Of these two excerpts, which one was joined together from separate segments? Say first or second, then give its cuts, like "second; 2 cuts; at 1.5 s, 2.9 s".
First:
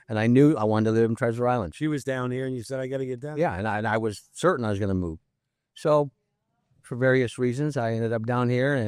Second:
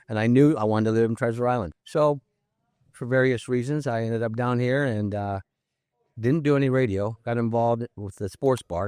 second; 1 cut; at 1.7 s